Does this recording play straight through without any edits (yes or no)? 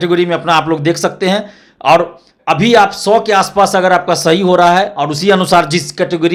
yes